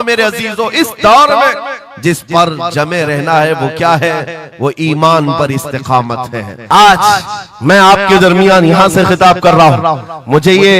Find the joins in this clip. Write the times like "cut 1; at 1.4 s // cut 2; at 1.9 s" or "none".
cut 1; at 6.5 s